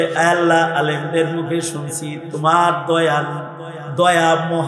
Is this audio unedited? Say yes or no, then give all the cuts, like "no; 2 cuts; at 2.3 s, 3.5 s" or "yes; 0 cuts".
yes; 0 cuts